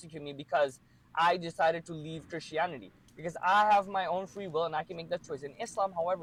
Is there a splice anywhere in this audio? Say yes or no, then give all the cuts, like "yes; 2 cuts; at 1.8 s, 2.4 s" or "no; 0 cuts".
no; 0 cuts